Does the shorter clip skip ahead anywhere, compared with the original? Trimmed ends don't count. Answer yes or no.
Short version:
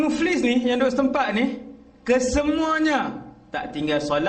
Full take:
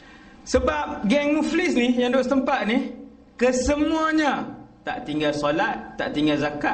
no